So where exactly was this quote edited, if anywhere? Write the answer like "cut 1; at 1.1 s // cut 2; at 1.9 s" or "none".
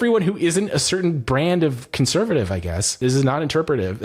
cut 1; at 2.9 s